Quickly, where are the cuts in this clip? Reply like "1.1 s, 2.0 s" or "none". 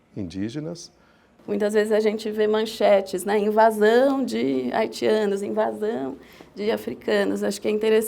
1.3 s